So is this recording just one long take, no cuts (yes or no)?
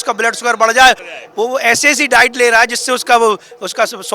no